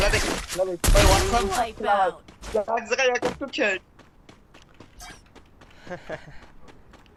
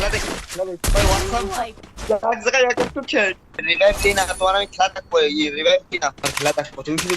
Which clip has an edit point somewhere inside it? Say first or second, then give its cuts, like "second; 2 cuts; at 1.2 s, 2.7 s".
second; 3 cuts; at 1.8 s, 3.7 s, 6.3 s